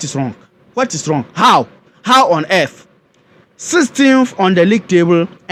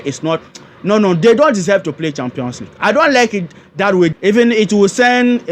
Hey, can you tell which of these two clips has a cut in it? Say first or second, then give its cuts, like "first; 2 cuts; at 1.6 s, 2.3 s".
second; 1 cut; at 4.2 s